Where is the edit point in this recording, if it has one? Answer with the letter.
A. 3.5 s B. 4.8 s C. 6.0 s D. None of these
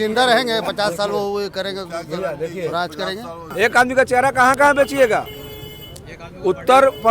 A